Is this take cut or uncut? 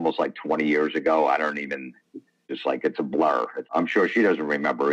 cut